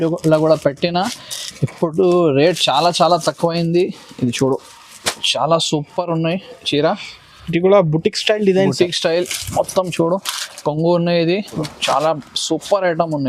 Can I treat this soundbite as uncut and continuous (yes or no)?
no